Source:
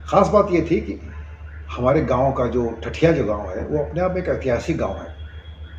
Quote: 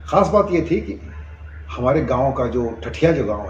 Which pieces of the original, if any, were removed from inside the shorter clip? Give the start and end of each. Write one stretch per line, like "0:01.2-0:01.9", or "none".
none